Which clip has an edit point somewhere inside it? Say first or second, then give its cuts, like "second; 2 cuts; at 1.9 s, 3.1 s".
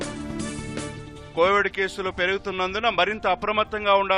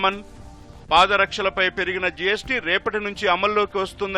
first; 1 cut; at 0.9 s